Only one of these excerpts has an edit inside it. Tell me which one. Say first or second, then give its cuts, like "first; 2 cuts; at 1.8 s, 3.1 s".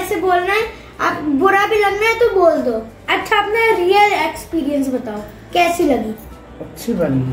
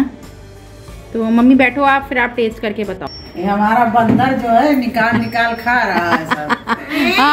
second; 1 cut; at 3.1 s